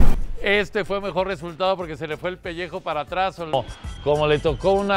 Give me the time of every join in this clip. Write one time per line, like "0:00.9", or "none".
0:03.5